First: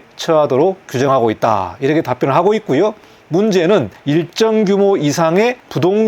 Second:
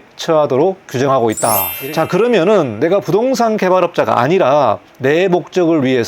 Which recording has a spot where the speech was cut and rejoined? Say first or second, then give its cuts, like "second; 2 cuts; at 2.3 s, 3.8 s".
second; 1 cut; at 1.7 s